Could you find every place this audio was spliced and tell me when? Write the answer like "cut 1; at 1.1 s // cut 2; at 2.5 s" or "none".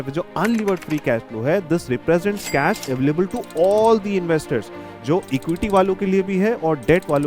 none